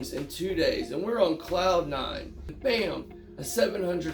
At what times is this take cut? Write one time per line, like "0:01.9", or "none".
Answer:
0:02.5